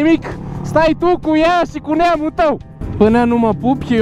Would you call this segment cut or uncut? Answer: cut